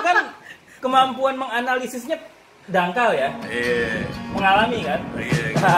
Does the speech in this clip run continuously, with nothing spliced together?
yes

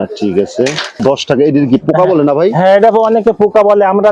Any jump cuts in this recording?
yes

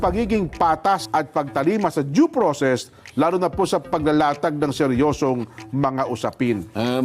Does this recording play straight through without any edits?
no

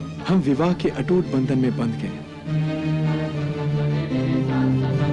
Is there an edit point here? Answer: no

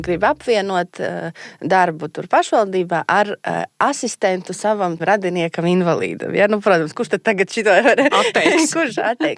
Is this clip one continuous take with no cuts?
no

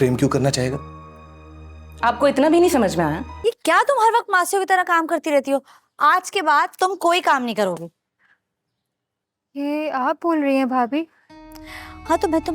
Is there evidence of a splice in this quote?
yes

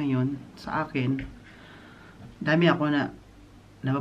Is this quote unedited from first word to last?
yes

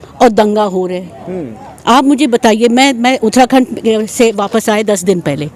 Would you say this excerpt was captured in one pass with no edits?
yes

